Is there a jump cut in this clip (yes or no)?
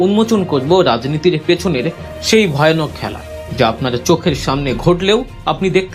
no